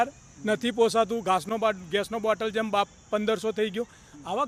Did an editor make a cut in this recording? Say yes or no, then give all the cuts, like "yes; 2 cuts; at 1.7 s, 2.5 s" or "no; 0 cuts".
no; 0 cuts